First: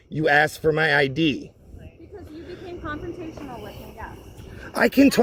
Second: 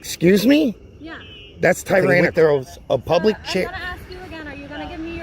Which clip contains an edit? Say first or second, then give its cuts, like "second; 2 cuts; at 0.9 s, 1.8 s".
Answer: second; 1 cut; at 2.2 s